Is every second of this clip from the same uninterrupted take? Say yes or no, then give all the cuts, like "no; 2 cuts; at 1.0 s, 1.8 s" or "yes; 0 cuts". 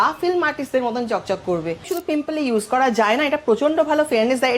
no; 1 cut; at 1.9 s